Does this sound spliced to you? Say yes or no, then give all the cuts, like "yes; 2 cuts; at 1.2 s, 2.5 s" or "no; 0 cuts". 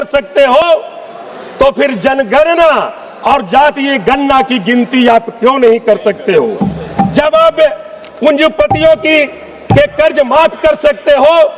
no; 0 cuts